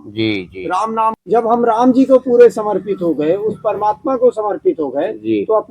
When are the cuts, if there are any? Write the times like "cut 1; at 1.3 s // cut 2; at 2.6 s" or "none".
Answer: cut 1; at 1.2 s